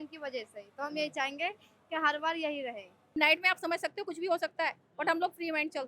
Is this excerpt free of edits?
no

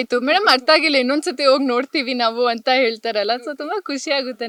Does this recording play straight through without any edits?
yes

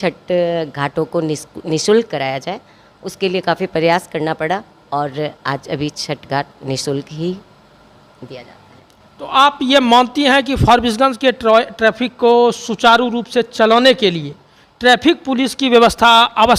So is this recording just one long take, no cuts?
yes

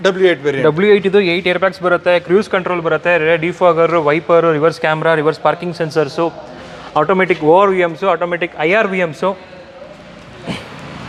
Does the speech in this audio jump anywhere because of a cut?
no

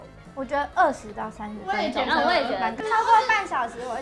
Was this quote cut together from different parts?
yes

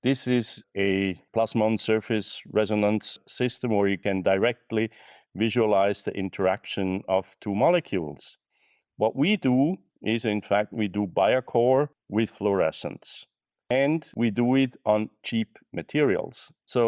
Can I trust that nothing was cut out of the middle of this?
yes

